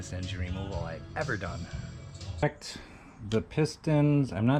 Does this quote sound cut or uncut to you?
cut